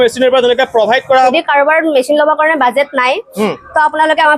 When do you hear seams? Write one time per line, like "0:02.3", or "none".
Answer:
0:01.3